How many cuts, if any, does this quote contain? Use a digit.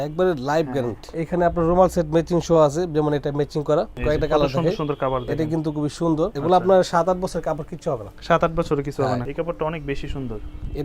4